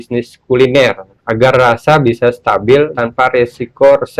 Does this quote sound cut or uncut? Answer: cut